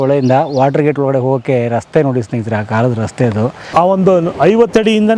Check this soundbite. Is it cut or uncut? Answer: cut